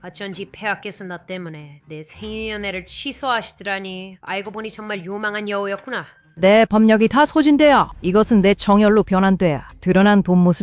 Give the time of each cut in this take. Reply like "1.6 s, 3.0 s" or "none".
none